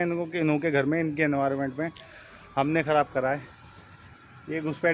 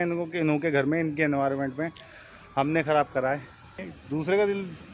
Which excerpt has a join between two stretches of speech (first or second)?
second